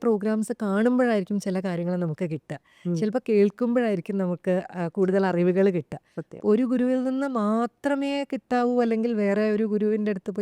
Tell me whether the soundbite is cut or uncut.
uncut